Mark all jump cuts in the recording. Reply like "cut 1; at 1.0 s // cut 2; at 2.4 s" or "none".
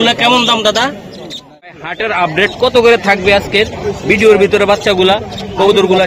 cut 1; at 1.8 s